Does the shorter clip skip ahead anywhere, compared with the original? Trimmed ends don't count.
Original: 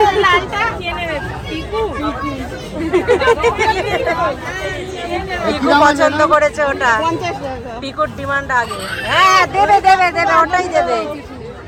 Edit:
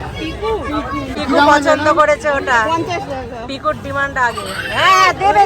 yes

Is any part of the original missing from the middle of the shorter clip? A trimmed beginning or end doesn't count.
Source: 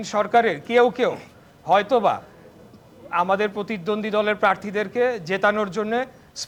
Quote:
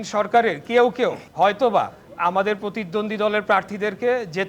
yes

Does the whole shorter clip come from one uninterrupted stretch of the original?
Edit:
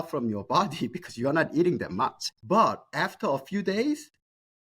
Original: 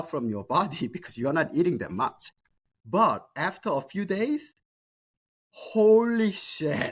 no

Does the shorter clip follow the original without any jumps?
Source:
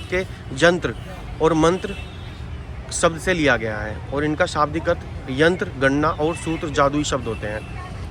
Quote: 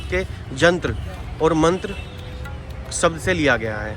yes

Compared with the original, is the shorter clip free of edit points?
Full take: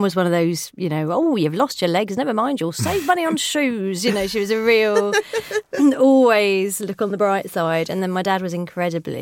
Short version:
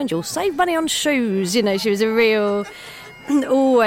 yes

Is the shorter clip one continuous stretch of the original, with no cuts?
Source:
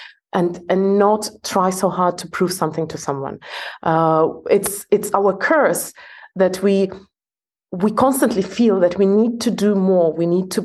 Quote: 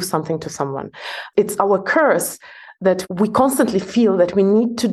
no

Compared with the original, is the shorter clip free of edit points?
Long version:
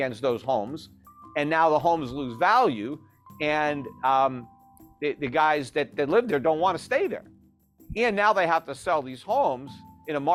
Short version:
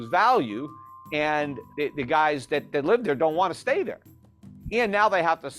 no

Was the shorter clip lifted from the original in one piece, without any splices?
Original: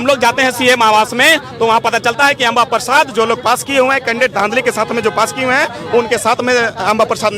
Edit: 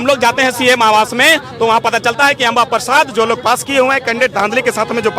yes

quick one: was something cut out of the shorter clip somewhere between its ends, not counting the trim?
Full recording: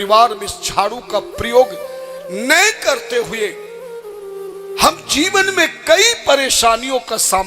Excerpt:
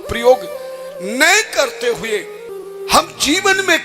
yes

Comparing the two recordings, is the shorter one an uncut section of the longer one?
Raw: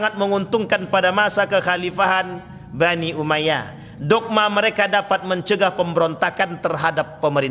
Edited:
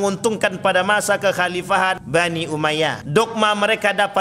no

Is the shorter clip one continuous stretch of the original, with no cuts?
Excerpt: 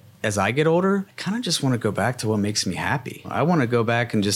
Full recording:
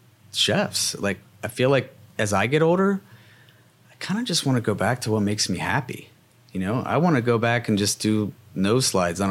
no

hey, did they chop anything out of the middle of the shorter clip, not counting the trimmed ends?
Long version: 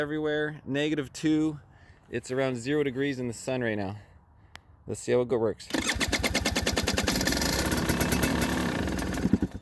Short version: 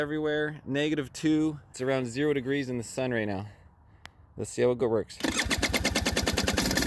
yes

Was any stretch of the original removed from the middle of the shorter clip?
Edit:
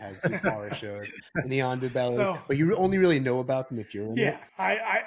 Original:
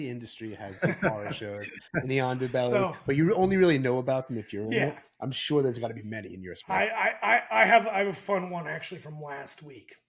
yes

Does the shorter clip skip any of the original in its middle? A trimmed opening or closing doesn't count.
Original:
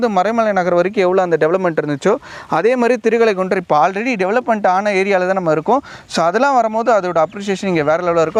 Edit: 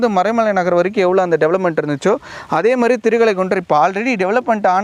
no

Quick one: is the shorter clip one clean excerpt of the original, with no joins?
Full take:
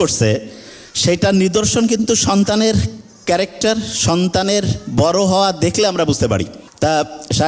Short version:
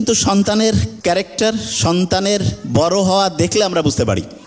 no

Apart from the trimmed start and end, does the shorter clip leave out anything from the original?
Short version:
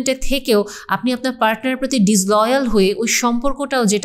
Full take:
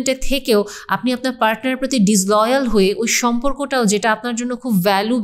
no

